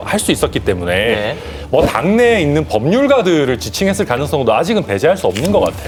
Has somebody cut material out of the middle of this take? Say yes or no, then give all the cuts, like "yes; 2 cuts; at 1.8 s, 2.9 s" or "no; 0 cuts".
no; 0 cuts